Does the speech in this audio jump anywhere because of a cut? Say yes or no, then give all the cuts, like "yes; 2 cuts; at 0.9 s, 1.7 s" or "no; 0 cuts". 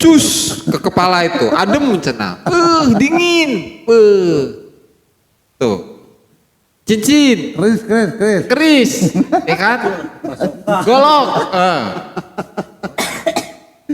no; 0 cuts